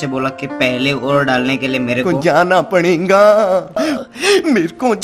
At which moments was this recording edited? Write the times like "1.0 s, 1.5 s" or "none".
2.0 s

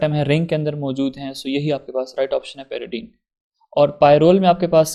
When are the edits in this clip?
none

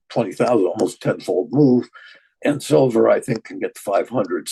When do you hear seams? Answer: 2.3 s

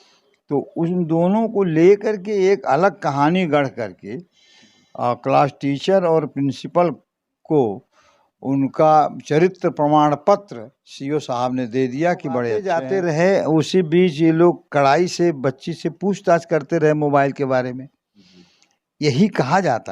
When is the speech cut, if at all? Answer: 12.6 s

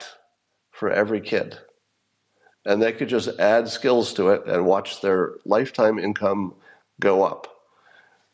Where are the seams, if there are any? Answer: none

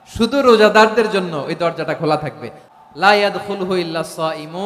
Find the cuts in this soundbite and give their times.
2.6 s

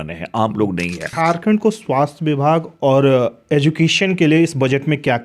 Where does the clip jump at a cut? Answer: 1.0 s

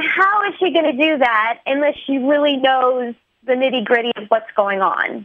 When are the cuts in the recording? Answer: none

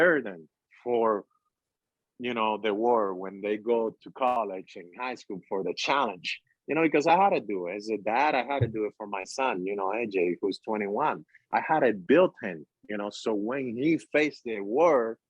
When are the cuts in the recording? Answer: 4.4 s

